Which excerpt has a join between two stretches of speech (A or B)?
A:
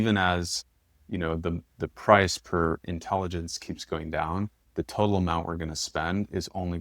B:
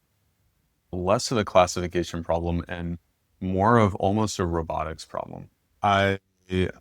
B